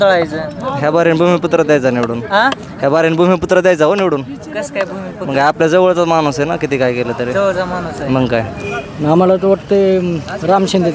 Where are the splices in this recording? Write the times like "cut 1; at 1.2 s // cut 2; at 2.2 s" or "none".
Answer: cut 1; at 8.6 s